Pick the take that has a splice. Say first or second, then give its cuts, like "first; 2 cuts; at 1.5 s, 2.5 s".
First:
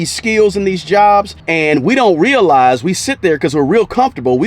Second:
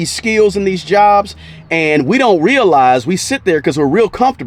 first; 1 cut; at 1.4 s